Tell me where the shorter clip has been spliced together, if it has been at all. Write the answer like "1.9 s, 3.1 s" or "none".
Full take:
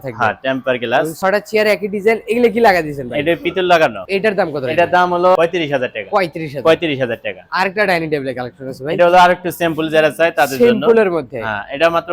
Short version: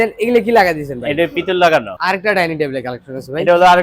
1.9 s